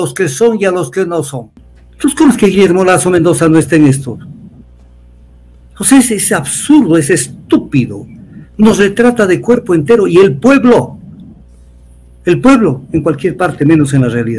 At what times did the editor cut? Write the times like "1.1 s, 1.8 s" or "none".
none